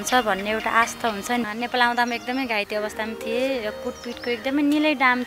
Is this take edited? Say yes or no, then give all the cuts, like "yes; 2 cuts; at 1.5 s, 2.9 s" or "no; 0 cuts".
yes; 1 cut; at 1.5 s